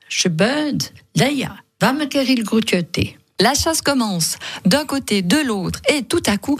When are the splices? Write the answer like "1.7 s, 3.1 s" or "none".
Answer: none